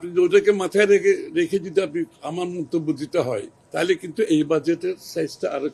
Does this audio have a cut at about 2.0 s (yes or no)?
no